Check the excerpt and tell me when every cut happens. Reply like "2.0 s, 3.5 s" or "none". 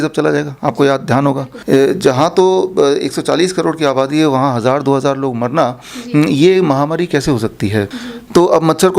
1.5 s, 8.0 s